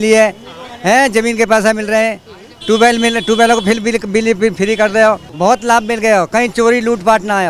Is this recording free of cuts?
no; 1 cut; at 5.3 s

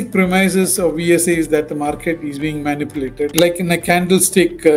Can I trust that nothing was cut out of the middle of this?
no; 1 cut; at 3.3 s

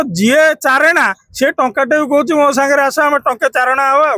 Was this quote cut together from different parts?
no; 0 cuts

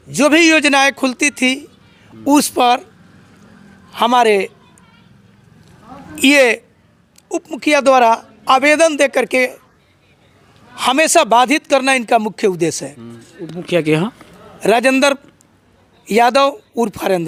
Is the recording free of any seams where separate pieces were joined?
yes; 0 cuts

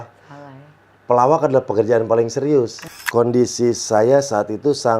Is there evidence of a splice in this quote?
yes; 1 cut; at 2.8 s

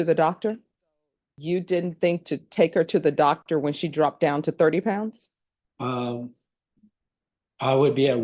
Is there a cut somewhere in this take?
yes; 1 cut; at 1.3 s

